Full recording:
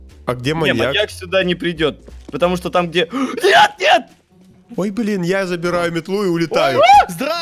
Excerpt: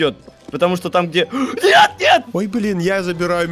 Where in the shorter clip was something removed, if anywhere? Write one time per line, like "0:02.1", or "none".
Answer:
0:02.3